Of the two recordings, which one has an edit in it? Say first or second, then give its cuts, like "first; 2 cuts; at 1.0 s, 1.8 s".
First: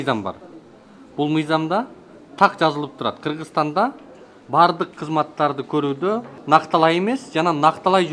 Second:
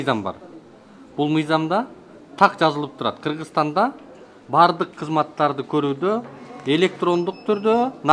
first; 1 cut; at 6.4 s